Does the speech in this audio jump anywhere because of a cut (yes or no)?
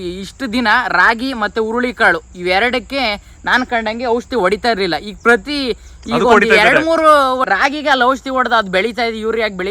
yes